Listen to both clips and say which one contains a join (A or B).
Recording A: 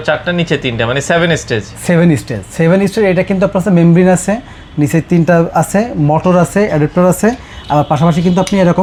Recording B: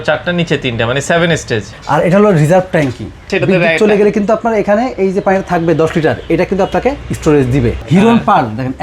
B